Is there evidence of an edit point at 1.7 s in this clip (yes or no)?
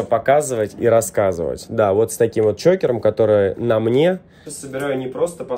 no